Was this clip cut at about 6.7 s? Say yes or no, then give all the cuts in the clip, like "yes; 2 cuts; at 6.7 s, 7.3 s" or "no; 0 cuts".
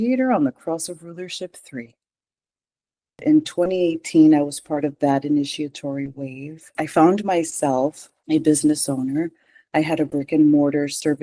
yes; 3 cuts; at 3.2 s, 6.7 s, 8.1 s